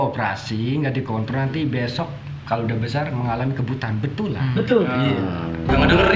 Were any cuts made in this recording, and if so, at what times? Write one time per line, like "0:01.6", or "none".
none